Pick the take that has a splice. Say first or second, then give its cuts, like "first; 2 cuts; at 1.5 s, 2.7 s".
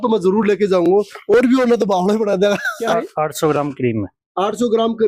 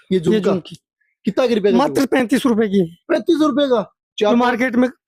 first; 1 cut; at 2.7 s